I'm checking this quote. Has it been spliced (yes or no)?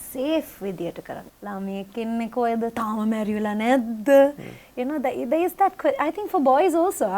yes